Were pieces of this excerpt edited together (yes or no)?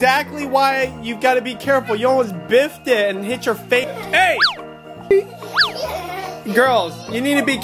yes